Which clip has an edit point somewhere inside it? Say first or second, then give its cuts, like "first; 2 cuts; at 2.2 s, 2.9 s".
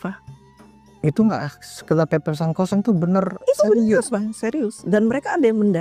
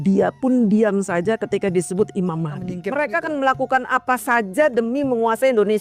second; 1 cut; at 2.8 s